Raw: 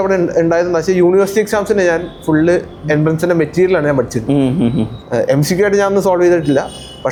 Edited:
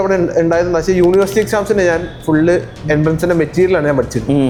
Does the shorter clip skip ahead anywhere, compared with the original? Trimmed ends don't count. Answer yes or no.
no